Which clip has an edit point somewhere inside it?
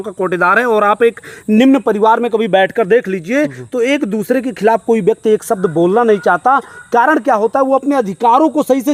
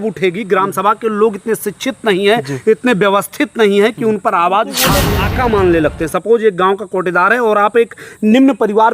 second; 1 cut; at 5.1 s

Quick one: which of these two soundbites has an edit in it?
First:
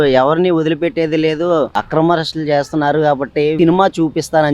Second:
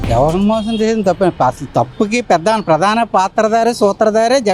first; 1 cut; at 3.5 s

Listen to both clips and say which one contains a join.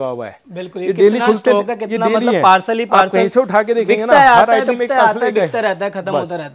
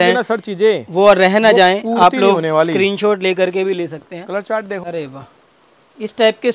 second; 1 cut; at 4.8 s

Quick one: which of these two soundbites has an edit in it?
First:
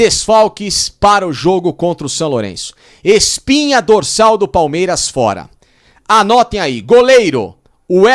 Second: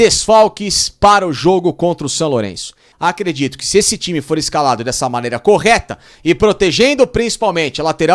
second; 1 cut; at 2.9 s

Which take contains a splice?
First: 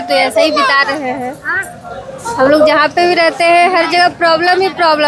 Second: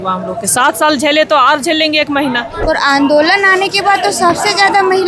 second; 1 cut; at 2.5 s

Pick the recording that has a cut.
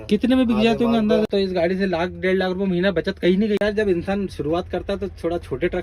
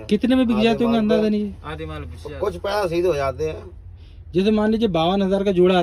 first; 2 cuts; at 1.3 s, 3.6 s

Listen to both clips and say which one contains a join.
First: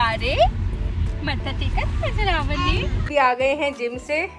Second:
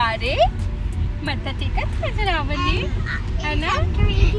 first; 1 cut; at 3.1 s

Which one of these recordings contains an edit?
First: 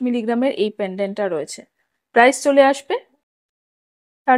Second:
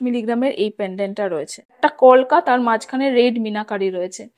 second; 1 cut; at 1.8 s

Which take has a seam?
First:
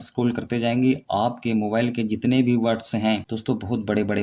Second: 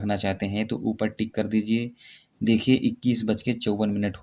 first; 1 cut; at 3.3 s

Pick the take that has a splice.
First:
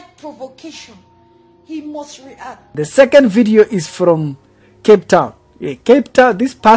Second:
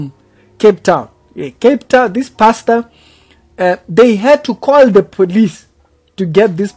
first; 1 cut; at 2.6 s

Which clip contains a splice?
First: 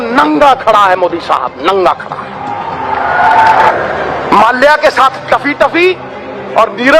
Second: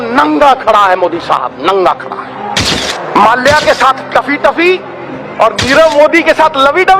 second; 1 cut; at 2.8 s

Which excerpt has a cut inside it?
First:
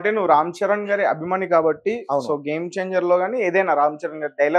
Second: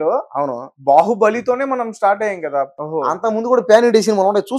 second; 1 cut; at 2.7 s

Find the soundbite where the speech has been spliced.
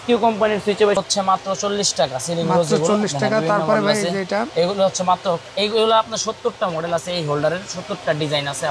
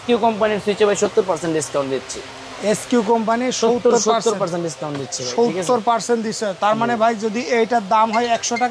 first; 1 cut; at 1.0 s

